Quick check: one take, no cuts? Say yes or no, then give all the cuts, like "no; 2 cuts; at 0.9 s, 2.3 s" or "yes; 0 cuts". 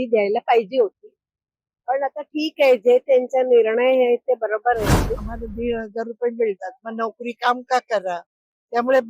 no; 1 cut; at 5.3 s